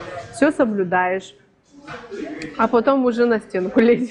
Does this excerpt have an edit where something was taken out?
no; 0 cuts

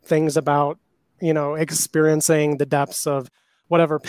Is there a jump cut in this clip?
no; 0 cuts

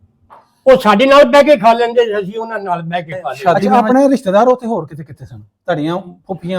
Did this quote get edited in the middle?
yes; 1 cut; at 3.6 s

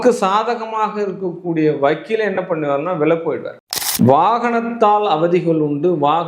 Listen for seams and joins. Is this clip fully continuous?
no; 1 cut; at 3.5 s

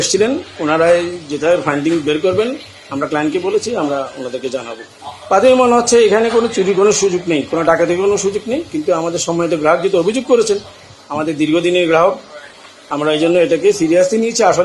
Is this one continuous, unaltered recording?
yes; 0 cuts

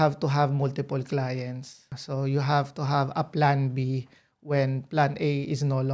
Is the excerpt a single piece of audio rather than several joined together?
yes; 0 cuts

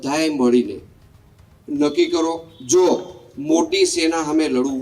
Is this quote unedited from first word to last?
no; 1 cut; at 2.5 s

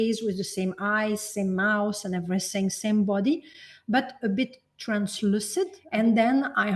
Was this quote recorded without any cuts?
no; 1 cut; at 5.8 s

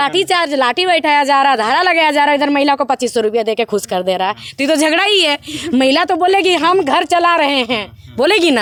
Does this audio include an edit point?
no; 0 cuts

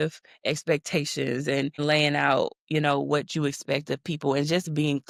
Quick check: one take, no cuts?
yes; 0 cuts

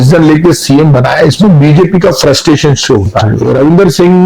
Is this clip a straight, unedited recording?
no; 1 cut; at 3.3 s

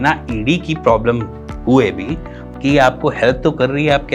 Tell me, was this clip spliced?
yes; 1 cut; at 2.3 s

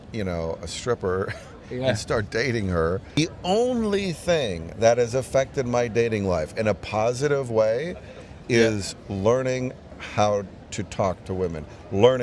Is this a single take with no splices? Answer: no; 1 cut; at 3.2 s

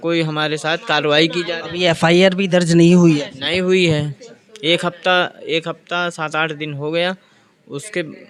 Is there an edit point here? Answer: no; 0 cuts

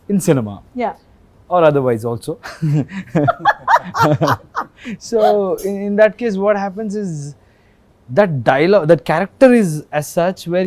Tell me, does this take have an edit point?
no; 0 cuts

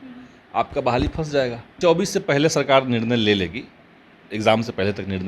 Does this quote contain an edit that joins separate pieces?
yes; 1 cut; at 1.7 s

